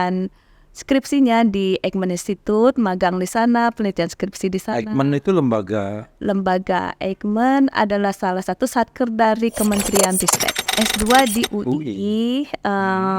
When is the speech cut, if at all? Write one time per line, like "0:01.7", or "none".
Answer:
0:10.7